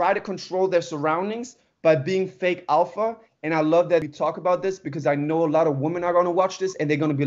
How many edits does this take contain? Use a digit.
1